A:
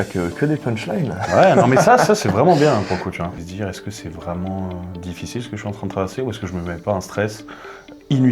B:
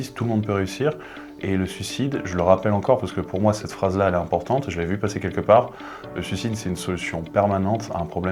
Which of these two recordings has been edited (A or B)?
A